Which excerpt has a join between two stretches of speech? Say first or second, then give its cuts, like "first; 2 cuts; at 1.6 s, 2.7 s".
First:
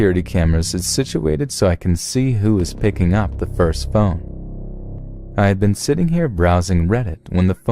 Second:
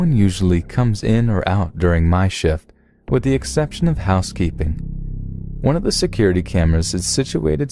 second; 1 cut; at 2.3 s